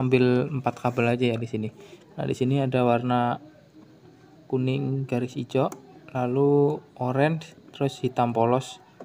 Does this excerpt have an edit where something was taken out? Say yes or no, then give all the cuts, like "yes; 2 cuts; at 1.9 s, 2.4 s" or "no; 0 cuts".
no; 0 cuts